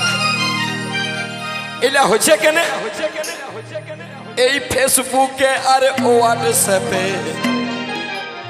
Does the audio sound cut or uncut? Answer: uncut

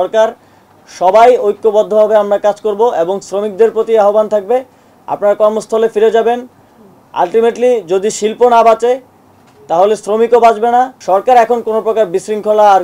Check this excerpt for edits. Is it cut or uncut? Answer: cut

